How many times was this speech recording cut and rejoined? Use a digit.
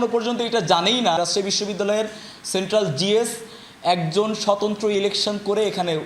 1